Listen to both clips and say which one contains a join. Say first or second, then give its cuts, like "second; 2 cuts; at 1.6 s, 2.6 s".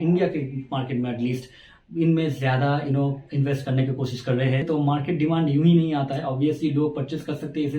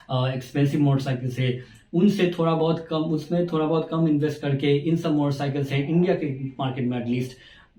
first; 1 cut; at 4.6 s